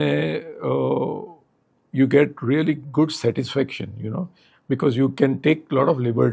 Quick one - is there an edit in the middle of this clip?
no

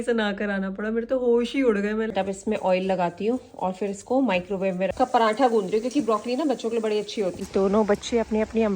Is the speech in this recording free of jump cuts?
no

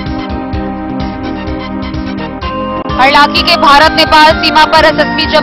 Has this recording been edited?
yes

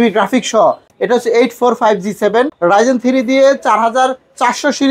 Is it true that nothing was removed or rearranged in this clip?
no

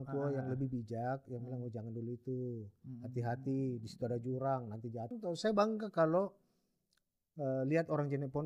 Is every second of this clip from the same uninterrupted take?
no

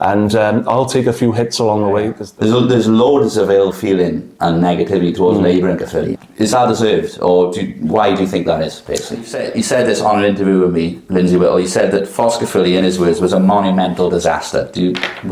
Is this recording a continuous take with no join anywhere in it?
no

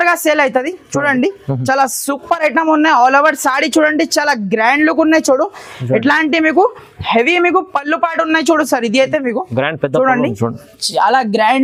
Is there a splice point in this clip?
no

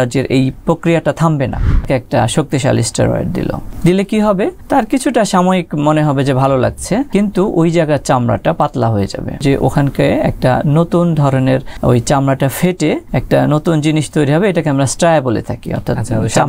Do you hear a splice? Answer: yes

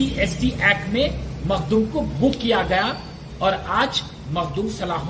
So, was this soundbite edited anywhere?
no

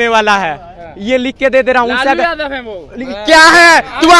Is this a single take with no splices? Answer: yes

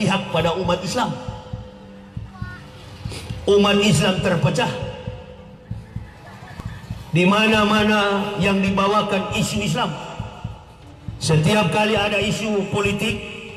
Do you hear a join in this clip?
no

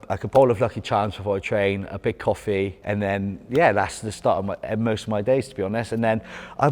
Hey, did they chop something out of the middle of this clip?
no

